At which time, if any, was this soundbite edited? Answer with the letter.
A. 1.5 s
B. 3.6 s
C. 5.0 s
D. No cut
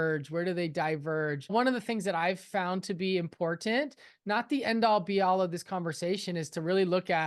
A